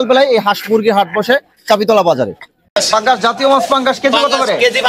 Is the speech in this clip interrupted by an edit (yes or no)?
yes